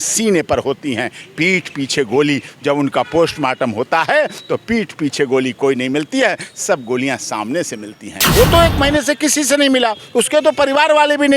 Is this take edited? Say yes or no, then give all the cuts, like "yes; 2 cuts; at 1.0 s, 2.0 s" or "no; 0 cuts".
yes; 1 cut; at 8.3 s